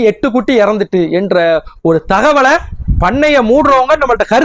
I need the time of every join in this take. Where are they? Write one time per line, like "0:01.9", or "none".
none